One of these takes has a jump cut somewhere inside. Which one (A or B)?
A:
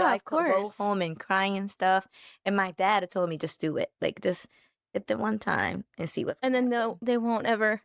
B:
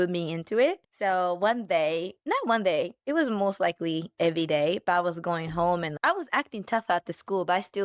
B